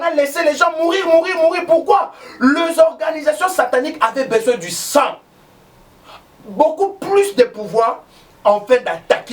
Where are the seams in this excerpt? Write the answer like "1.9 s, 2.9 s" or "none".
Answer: none